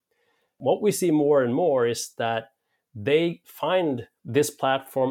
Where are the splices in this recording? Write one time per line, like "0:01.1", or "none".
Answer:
0:04.1